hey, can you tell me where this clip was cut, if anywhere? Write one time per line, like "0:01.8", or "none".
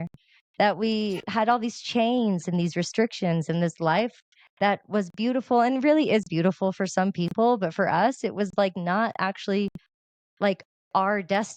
none

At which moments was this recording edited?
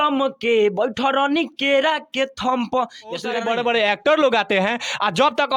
0:03.4

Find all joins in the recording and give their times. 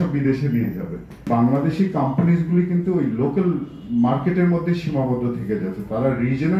0:01.3

